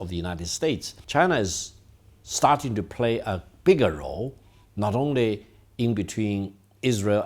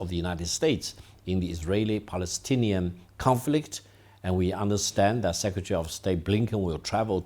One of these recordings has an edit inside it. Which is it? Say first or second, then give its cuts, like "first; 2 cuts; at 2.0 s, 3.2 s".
first; 1 cut; at 0.9 s